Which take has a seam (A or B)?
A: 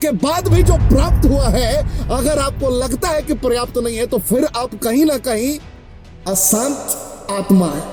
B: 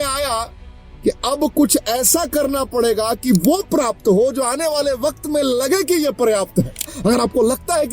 B